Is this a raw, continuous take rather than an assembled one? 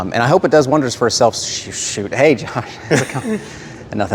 yes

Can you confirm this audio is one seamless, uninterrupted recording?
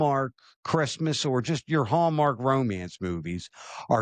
yes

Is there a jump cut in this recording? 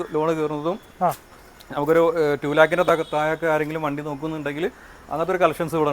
no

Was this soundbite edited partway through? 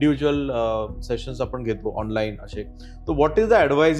no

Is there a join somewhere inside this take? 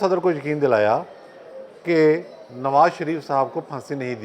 no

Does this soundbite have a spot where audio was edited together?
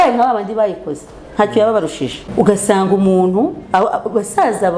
yes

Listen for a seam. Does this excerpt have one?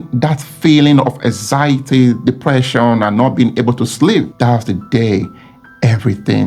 no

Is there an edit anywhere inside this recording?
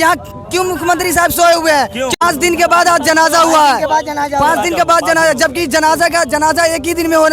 yes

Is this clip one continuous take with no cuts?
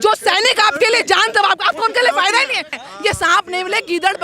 no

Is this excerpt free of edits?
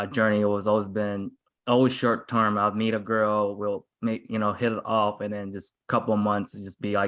yes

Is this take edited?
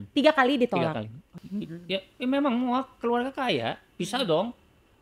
yes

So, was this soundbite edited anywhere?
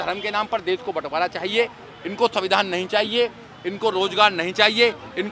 no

